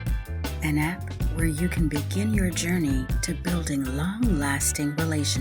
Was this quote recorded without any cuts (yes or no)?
yes